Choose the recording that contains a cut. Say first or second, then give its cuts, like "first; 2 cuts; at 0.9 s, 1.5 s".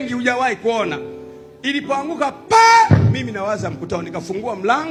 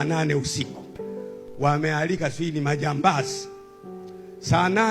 second; 1 cut; at 0.9 s